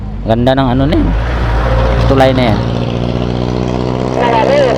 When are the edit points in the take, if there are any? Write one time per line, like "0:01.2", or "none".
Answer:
none